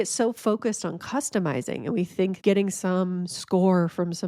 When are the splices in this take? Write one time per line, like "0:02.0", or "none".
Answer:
0:02.4